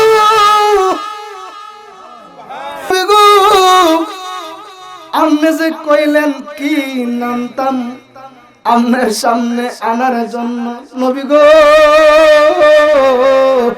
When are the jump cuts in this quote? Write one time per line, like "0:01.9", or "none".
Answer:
0:02.9